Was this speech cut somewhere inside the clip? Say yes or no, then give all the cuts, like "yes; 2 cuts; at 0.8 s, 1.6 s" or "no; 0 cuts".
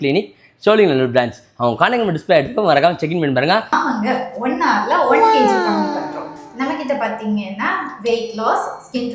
yes; 1 cut; at 3.7 s